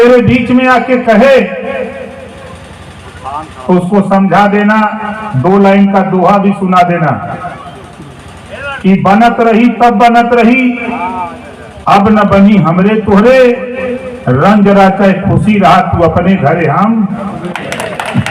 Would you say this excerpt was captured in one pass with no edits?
yes; 0 cuts

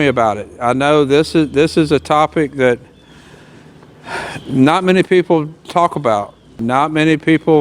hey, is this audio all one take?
no; 1 cut; at 6.6 s

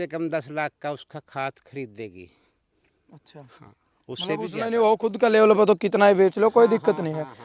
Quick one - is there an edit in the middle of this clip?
no; 0 cuts

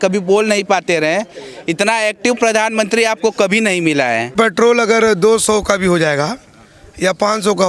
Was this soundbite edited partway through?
yes; 1 cut; at 4.3 s

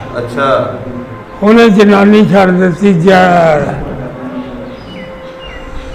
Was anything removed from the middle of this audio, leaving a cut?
no; 0 cuts

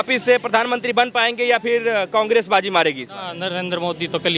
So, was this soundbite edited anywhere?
no; 0 cuts

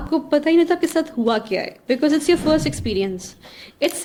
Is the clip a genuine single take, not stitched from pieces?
yes; 0 cuts

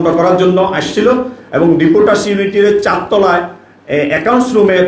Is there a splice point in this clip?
no; 0 cuts

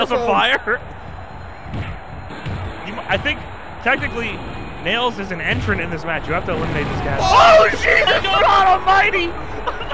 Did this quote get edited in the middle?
yes; 1 cut; at 7.2 s

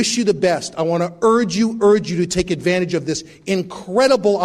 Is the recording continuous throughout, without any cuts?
yes; 0 cuts

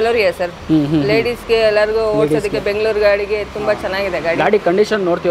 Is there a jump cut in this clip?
no; 0 cuts

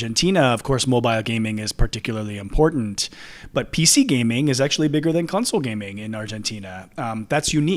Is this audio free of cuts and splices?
yes; 0 cuts

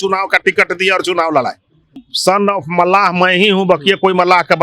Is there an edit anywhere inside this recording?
yes; 1 cut; at 2.1 s

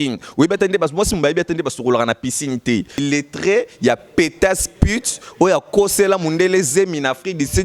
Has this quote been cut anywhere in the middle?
yes; 1 cut; at 3.0 s

